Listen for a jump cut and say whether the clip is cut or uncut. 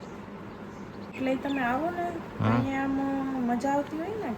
cut